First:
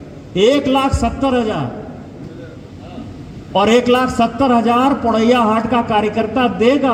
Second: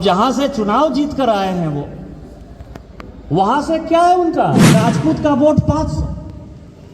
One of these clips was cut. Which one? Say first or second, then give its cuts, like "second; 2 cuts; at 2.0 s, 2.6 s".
second; 1 cut; at 4.8 s